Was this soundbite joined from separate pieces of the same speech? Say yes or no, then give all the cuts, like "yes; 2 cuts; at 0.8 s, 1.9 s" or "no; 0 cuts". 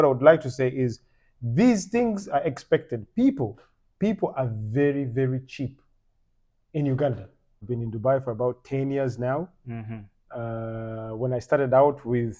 yes; 1 cut; at 7.6 s